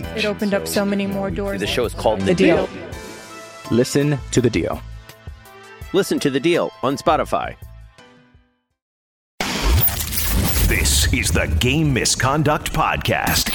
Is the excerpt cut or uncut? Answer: cut